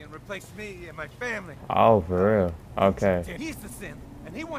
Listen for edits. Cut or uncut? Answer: cut